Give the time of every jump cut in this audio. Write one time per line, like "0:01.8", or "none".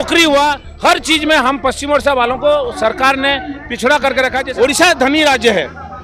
0:04.4